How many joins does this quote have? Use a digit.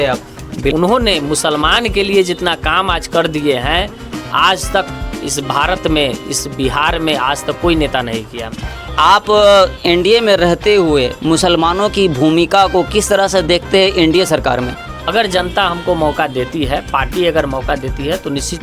3